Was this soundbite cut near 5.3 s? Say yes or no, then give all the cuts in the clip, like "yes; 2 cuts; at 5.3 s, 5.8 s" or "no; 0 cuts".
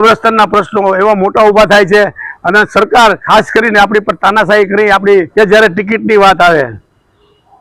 yes; 1 cut; at 5.3 s